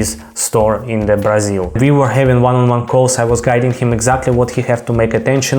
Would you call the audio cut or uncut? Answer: cut